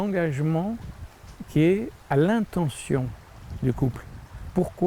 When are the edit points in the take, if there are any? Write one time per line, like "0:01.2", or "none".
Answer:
0:02.0